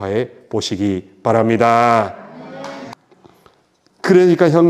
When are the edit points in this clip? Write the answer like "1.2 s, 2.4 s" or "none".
2.9 s